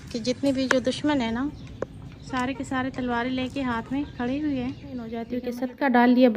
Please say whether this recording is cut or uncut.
cut